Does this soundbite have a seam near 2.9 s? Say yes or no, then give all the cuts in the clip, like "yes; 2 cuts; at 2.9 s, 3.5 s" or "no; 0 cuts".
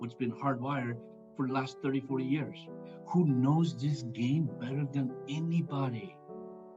yes; 1 cut; at 2.9 s